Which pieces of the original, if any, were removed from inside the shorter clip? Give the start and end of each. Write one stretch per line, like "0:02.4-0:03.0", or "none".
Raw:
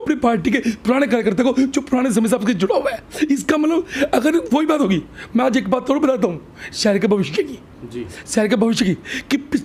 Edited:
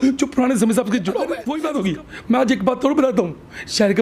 0:03.0-0:04.5

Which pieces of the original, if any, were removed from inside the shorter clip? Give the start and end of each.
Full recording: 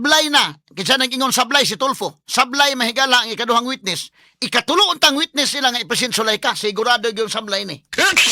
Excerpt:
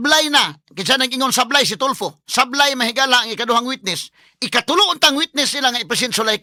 none

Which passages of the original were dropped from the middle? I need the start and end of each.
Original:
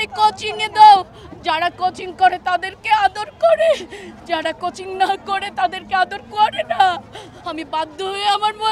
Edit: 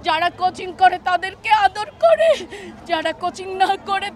none

